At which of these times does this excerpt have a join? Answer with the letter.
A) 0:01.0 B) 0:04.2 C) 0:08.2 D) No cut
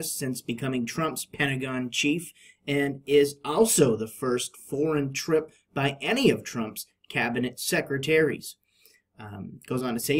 C